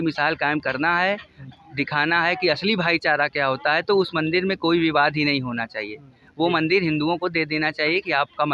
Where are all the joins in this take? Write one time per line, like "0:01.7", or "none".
none